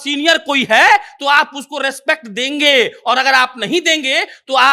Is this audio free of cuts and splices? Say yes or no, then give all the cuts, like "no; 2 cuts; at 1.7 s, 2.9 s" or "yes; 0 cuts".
yes; 0 cuts